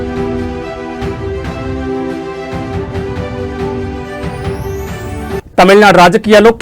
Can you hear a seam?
yes; 1 cut; at 5.1 s

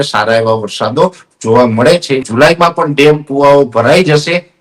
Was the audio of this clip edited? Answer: yes; 1 cut; at 2.3 s

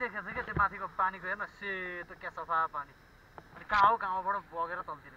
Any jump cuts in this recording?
no; 0 cuts

